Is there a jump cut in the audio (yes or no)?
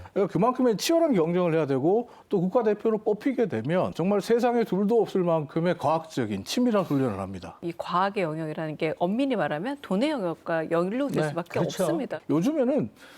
yes